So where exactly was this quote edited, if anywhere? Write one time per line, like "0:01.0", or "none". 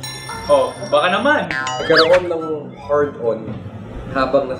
0:01.8